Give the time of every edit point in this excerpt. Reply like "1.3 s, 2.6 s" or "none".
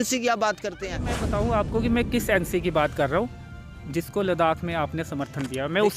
1.1 s